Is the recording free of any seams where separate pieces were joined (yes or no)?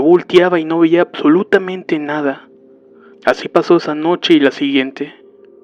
yes